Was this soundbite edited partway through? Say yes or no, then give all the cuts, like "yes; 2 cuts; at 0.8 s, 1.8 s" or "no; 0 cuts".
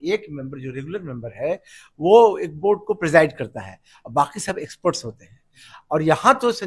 no; 0 cuts